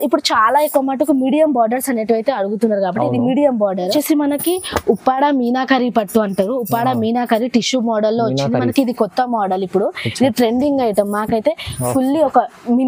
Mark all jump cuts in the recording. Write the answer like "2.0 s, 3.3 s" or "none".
3.9 s